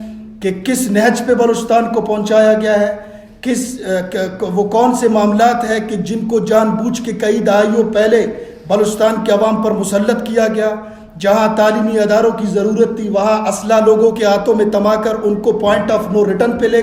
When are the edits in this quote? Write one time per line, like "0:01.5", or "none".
none